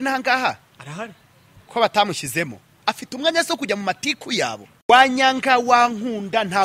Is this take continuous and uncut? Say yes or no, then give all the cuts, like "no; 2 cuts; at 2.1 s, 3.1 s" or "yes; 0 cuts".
no; 1 cut; at 4.8 s